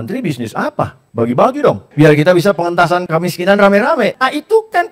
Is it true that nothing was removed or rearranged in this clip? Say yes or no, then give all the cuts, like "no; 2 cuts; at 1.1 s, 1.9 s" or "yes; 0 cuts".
no; 4 cuts; at 1.0 s, 1.8 s, 3.1 s, 4.2 s